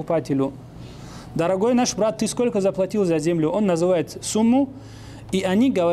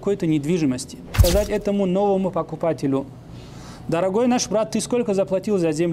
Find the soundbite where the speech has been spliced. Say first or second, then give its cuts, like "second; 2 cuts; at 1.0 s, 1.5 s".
second; 1 cut; at 1.1 s